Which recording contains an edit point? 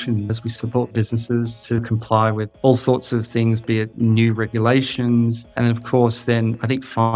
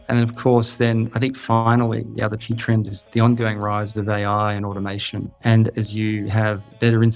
first; 2 cuts; at 2.5 s, 3.9 s

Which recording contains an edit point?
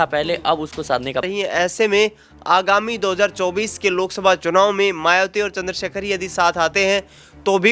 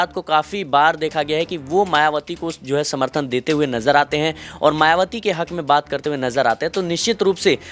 first; 1 cut; at 1.3 s

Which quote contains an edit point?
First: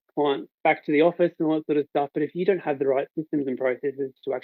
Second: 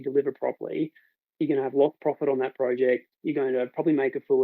second; 1 cut; at 1.3 s

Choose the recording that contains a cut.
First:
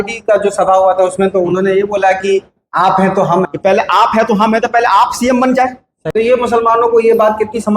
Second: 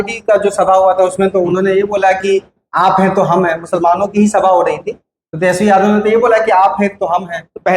first; 2 cuts; at 3.5 s, 6.0 s

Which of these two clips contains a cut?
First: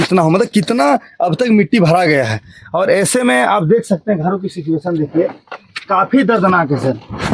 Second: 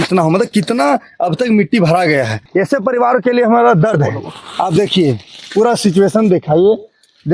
second; 1 cut; at 2.4 s

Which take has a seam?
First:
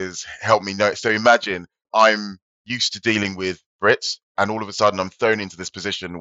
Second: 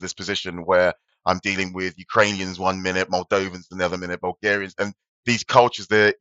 first; 1 cut; at 1.8 s

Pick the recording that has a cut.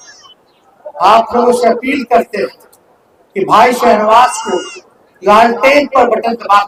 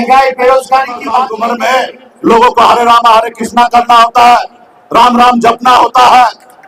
second; 1 cut; at 1.3 s

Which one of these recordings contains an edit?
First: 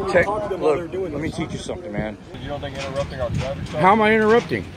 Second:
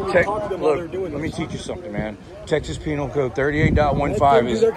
first; 1 cut; at 2.3 s

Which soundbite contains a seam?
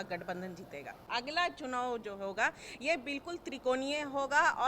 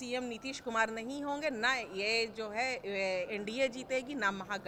first; 1 cut; at 1.0 s

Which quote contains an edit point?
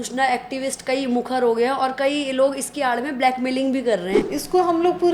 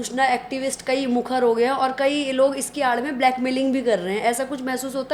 first; 1 cut; at 4.2 s

